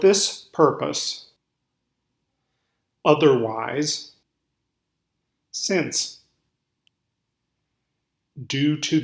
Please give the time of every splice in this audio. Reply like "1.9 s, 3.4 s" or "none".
1.4 s, 4.2 s, 6.5 s